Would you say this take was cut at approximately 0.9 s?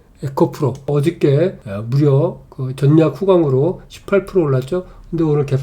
yes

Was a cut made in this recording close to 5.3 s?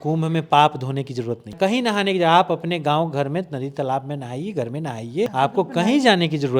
yes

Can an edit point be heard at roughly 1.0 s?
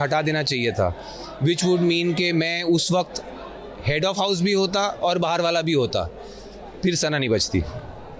no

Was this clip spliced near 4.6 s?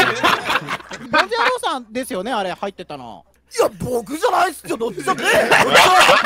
no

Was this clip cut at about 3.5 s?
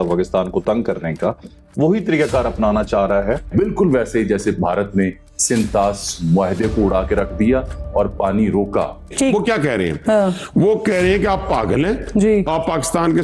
yes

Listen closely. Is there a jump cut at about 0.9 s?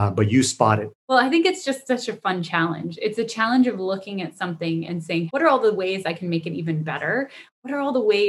yes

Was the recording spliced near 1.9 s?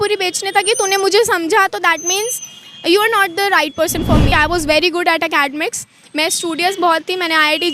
no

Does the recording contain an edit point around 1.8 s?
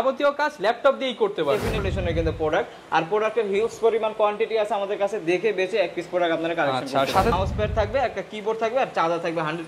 yes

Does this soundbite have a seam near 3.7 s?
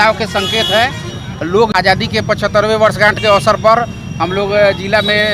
no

